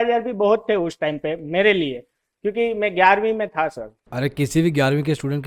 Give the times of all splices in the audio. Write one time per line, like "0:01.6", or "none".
none